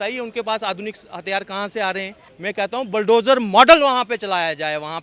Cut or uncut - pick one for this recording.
cut